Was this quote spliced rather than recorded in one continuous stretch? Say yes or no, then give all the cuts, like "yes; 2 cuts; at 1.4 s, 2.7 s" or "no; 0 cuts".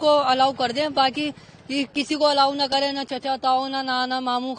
no; 0 cuts